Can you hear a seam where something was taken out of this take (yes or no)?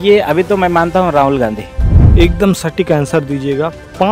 yes